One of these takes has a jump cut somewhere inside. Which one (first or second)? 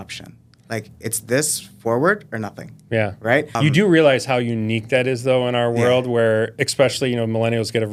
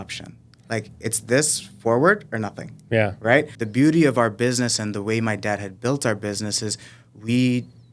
second